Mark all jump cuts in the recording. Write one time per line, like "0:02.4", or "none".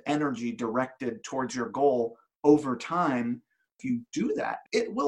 0:04.0